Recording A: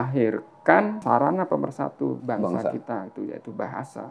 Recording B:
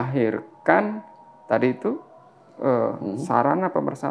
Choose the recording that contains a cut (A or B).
A